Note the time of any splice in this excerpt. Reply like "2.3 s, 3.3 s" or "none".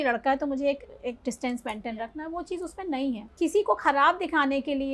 3.3 s